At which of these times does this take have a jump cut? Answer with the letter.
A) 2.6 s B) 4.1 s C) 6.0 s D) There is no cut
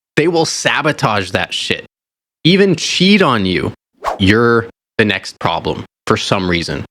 B